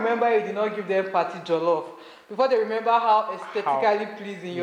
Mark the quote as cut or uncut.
uncut